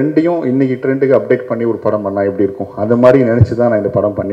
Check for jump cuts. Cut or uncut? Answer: uncut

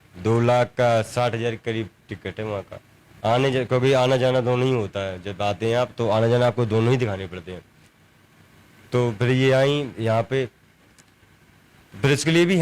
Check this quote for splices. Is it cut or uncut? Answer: uncut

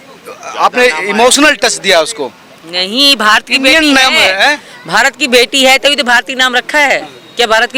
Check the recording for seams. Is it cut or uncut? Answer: uncut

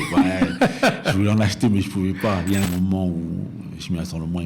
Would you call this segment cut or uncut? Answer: cut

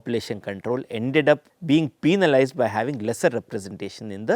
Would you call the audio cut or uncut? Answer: cut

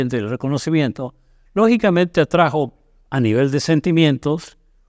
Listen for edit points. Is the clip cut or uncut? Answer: uncut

